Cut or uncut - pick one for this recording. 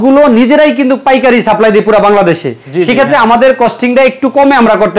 uncut